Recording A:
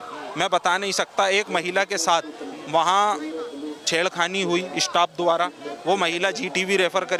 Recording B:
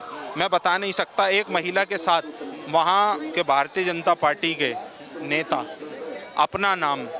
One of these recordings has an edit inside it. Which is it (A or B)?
B